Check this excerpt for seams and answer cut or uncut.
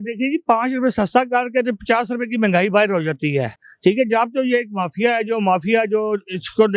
uncut